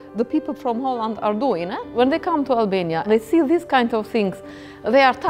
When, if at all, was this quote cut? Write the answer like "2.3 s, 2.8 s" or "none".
1.9 s, 3.1 s